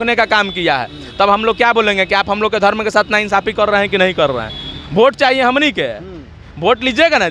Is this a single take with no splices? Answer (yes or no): yes